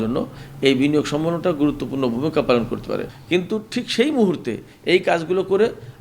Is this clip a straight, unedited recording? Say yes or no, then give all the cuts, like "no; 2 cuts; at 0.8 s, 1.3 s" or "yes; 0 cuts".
no; 1 cut; at 3.1 s